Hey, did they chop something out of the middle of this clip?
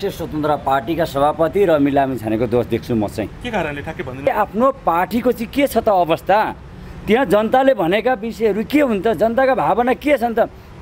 yes; 1 cut; at 4.3 s

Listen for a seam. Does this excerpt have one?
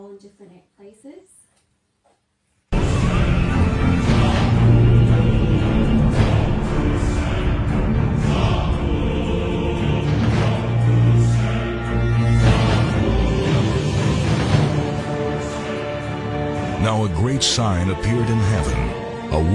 yes; 1 cut; at 7.2 s

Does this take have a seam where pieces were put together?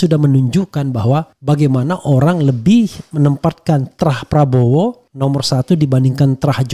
yes; 2 cuts; at 1.3 s, 5.1 s

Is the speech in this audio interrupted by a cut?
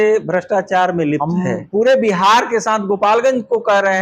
yes; 1 cut; at 1.2 s

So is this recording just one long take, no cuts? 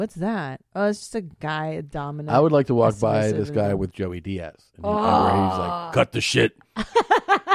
yes; 0 cuts

